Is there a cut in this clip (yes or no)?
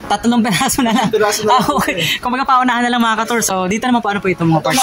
yes